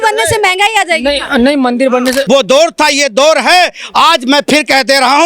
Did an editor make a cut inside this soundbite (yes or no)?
yes